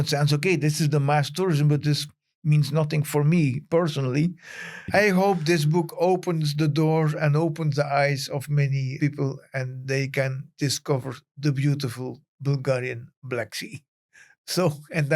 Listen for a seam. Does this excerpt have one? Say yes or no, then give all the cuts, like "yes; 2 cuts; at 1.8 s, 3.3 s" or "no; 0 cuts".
yes; 2 cuts; at 4.8 s, 8.9 s